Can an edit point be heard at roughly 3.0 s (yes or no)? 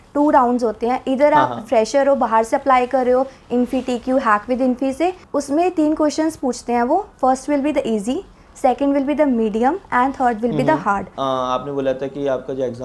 no